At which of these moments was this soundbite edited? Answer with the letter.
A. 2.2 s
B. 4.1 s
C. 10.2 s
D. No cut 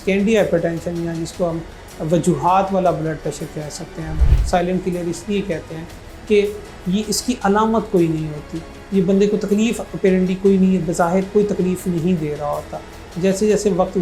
B